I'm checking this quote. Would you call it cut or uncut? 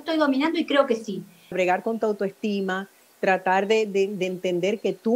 cut